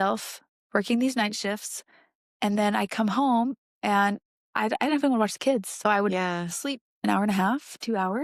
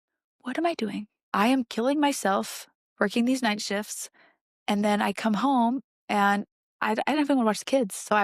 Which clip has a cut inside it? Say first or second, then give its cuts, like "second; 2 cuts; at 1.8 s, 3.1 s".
second; 1 cut; at 1.2 s